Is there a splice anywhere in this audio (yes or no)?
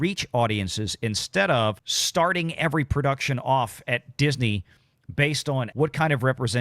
yes